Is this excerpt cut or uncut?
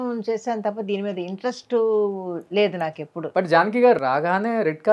cut